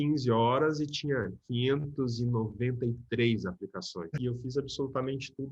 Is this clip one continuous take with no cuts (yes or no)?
no